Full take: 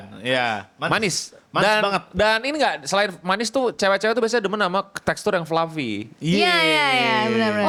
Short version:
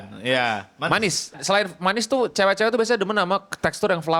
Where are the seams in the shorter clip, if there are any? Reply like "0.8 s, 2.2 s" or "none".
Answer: 1.4 s